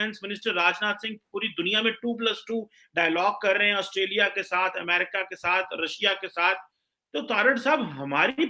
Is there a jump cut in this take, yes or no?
no